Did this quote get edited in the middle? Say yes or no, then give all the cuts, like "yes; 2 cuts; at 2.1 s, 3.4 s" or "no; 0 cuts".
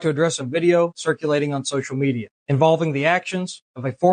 yes; 1 cut; at 2.3 s